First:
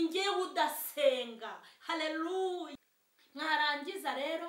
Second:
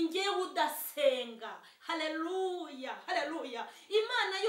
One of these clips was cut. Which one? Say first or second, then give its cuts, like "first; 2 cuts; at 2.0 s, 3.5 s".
first; 1 cut; at 2.7 s